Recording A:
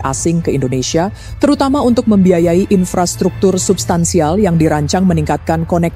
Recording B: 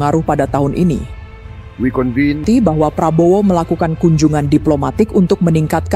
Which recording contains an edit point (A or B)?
B